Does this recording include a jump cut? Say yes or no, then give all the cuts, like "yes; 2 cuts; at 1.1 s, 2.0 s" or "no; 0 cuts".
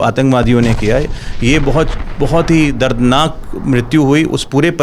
no; 0 cuts